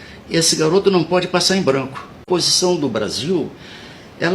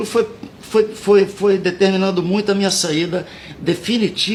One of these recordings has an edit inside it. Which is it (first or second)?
first